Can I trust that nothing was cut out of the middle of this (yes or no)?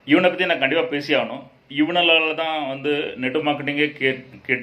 yes